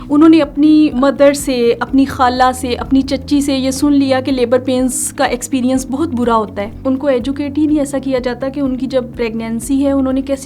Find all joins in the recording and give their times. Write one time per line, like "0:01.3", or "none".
0:01.0
0:06.7
0:09.1

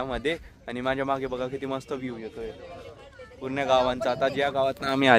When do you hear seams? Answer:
none

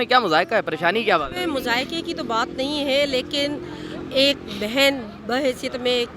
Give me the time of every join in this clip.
none

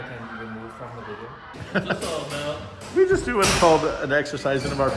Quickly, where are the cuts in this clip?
0:01.5

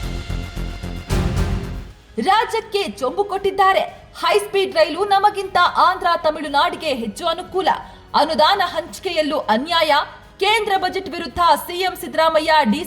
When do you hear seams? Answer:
0:01.7

